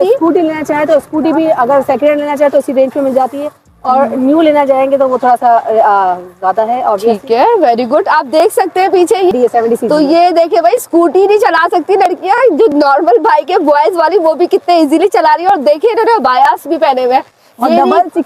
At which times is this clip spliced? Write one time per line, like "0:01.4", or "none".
none